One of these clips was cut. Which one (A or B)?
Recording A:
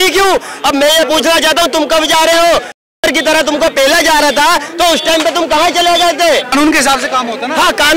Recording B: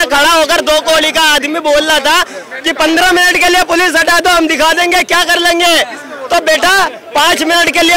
A